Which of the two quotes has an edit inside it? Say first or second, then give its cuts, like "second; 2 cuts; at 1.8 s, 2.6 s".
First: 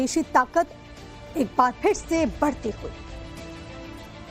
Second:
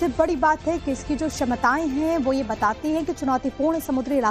first; 1 cut; at 3.1 s